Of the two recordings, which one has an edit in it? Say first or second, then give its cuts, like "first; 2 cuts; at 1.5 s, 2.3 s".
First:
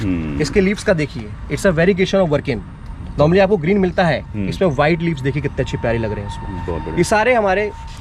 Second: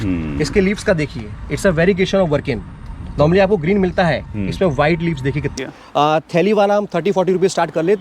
second; 1 cut; at 5.5 s